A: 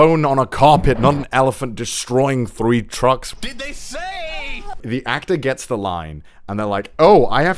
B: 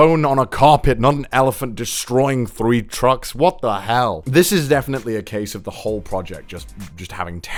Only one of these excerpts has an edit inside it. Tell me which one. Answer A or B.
A